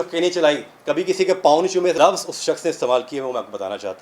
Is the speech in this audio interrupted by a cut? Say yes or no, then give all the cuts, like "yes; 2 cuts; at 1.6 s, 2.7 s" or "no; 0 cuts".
yes; 1 cut; at 2.0 s